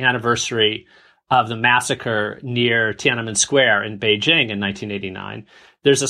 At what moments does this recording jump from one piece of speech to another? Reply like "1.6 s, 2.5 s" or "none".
none